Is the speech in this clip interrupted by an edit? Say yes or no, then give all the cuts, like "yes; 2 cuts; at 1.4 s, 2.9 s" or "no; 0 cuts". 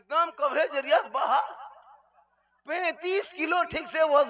no; 0 cuts